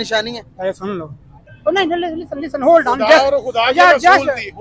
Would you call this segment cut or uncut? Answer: cut